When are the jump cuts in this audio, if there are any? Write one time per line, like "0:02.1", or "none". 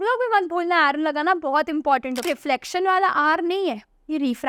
0:02.2

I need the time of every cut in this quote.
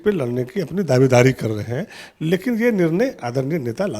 none

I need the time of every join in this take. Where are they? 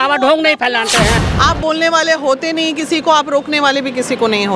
0:01.2

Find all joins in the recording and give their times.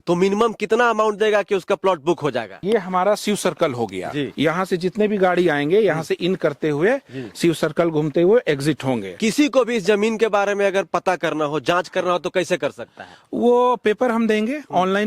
0:02.6
0:04.3
0:09.1

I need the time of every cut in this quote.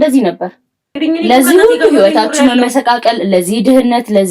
0:01.0

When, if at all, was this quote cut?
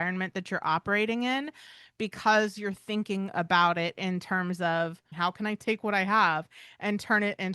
0:05.0

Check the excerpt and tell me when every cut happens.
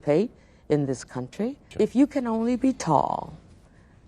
0:01.6

